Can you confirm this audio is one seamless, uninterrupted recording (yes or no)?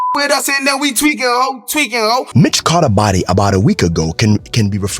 no